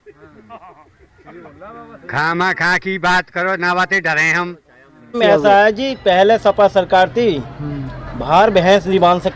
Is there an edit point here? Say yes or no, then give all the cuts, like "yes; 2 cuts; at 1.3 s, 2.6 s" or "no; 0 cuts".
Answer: yes; 1 cut; at 5.2 s